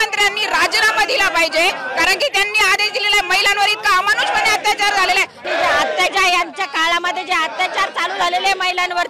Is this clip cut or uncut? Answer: cut